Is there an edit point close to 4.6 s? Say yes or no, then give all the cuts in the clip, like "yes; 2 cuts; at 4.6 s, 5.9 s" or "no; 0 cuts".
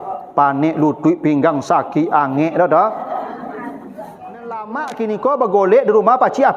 yes; 1 cut; at 4.6 s